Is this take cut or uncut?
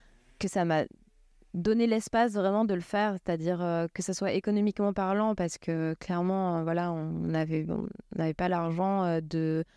uncut